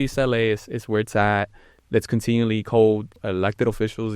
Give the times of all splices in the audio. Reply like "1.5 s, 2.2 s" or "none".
3.1 s